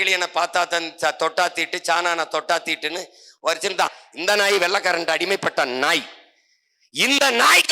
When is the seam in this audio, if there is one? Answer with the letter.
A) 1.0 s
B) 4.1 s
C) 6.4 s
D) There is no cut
B